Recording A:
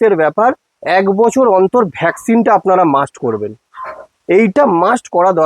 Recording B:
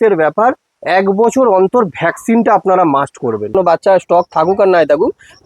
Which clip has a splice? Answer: B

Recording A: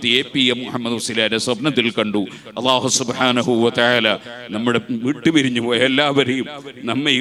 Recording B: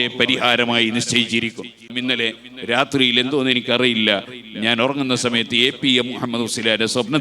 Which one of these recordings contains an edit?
B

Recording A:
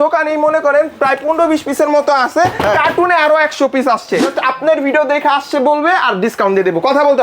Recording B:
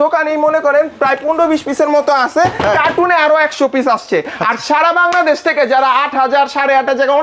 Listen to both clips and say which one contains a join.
A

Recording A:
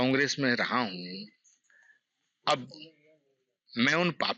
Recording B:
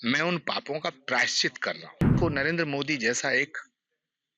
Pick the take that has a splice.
B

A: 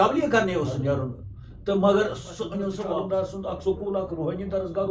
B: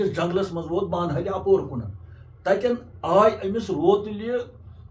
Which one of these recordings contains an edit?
A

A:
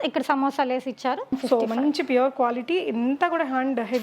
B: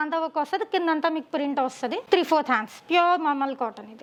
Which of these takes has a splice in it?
A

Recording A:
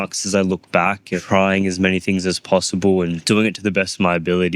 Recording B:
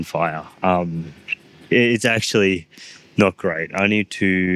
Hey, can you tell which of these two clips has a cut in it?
A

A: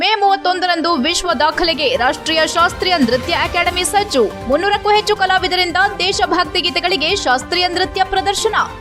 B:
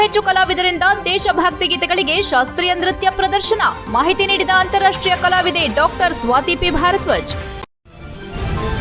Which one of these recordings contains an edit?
B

